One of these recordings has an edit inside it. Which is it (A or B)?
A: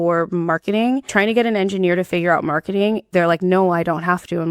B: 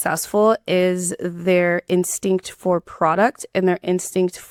A